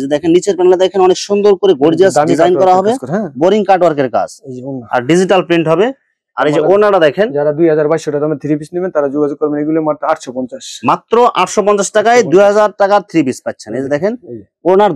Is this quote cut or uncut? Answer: uncut